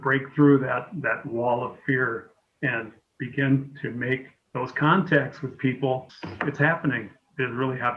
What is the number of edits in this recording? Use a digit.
1